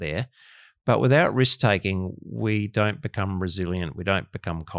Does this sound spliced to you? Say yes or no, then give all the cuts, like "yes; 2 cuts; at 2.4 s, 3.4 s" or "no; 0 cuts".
no; 0 cuts